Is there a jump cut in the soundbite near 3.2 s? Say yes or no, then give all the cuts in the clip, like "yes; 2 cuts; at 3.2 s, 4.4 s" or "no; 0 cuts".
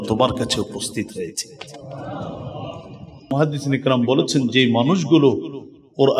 yes; 1 cut; at 3.2 s